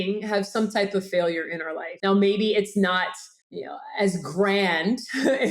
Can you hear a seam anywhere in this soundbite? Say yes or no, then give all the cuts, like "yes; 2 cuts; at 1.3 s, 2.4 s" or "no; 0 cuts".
yes; 1 cut; at 1.8 s